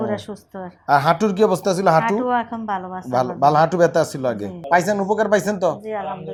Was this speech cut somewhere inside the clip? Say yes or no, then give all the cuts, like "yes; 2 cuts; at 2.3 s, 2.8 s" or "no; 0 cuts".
no; 0 cuts